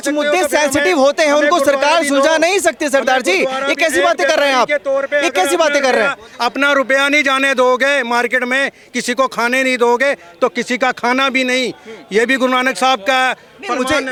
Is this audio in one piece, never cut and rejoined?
yes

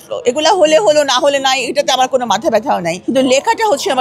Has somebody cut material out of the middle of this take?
yes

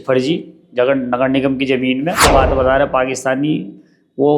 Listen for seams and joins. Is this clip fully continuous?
no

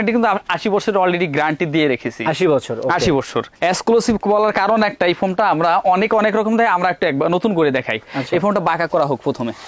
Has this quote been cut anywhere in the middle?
no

